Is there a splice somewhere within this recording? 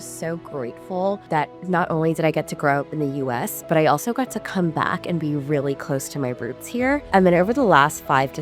yes; 2 cuts; at 1.2 s, 7.0 s

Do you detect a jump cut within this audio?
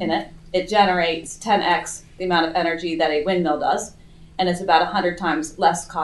no; 0 cuts

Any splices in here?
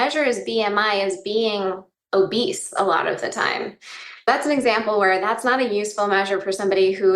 yes; 1 cut; at 4.3 s

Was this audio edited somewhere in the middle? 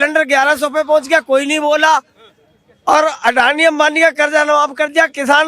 no; 0 cuts

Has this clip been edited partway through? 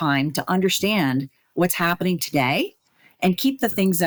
no; 0 cuts

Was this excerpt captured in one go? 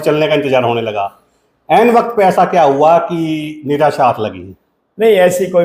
yes; 0 cuts

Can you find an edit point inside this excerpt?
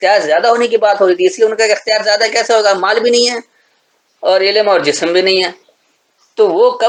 no; 0 cuts

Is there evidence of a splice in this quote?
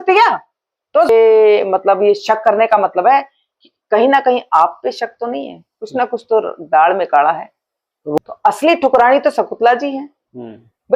yes; 2 cuts; at 1.1 s, 8.2 s

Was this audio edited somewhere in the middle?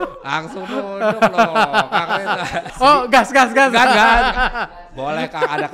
yes; 1 cut; at 2.6 s

